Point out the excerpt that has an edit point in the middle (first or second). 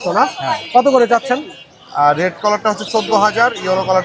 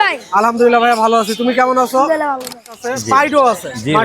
second